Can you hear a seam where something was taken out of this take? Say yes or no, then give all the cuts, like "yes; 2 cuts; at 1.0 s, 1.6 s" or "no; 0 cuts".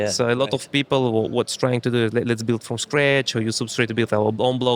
no; 0 cuts